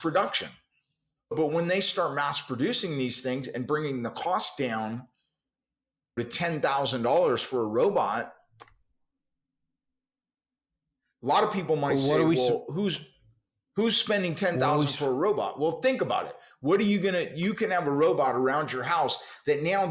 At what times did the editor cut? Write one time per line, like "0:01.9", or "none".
0:01.3
0:06.2